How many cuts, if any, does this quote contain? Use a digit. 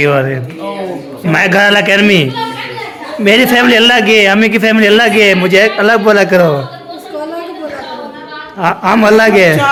0